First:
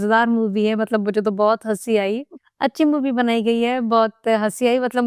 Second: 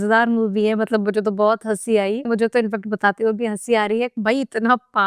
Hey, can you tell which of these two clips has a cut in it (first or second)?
second